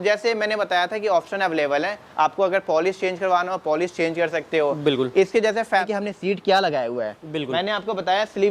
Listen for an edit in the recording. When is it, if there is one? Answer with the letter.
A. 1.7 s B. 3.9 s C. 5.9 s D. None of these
C